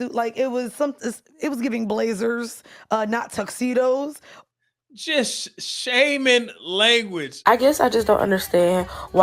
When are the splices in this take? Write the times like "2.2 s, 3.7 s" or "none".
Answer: 7.3 s